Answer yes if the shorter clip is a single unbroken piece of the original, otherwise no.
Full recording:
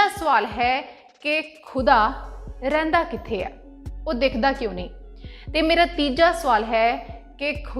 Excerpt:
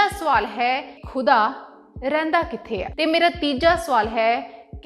no